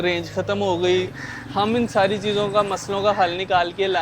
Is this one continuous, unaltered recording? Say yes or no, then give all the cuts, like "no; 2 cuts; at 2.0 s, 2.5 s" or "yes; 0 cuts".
no; 1 cut; at 1.1 s